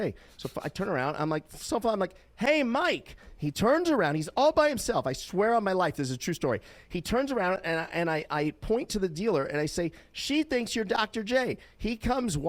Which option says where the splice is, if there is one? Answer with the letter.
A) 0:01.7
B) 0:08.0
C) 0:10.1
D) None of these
D